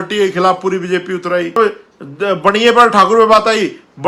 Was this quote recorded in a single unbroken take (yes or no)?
no